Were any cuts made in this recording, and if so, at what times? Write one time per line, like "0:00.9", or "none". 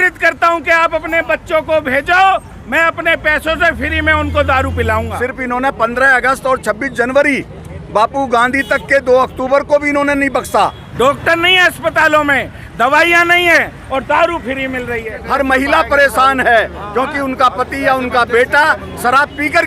0:05.1
0:10.8
0:15.1